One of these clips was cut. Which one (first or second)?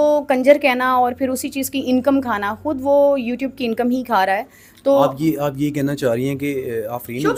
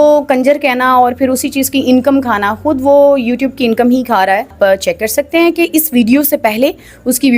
second